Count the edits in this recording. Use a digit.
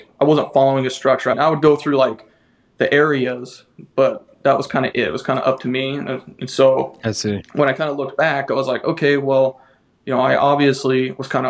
1